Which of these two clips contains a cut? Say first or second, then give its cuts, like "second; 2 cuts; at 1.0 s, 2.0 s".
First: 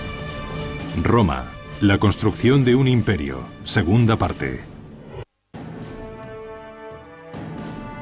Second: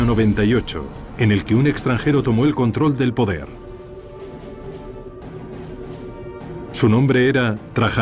second; 1 cut; at 4.4 s